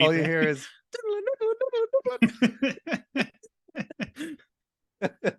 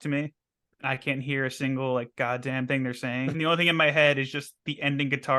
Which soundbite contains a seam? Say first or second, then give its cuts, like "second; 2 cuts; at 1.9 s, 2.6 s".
second; 1 cut; at 3.3 s